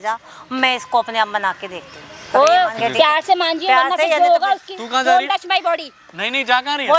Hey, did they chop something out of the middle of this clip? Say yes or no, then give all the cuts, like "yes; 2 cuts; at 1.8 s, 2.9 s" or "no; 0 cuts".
no; 0 cuts